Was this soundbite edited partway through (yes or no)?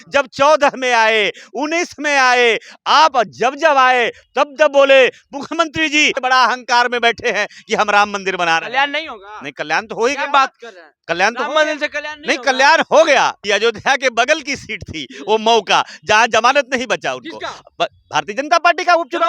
yes